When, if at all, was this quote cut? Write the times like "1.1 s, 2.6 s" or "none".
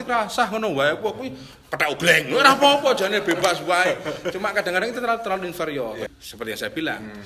6.1 s